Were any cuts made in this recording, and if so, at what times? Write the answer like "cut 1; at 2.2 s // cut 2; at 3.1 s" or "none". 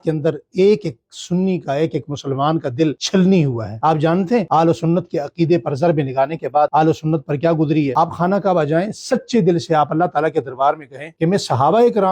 cut 1; at 7.9 s